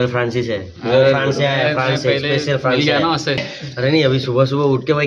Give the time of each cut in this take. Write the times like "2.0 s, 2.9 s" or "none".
3.5 s